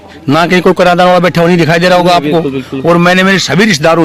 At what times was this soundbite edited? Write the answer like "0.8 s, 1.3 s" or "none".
none